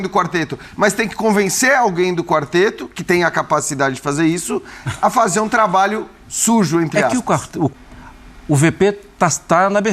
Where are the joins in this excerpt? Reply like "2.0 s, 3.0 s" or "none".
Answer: 7.7 s